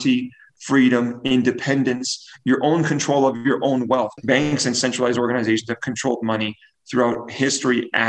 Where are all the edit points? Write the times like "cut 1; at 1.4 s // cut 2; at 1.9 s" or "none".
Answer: cut 1; at 4.1 s